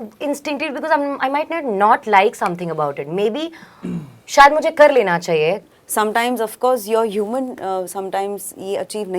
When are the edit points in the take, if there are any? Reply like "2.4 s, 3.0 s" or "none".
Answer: 5.7 s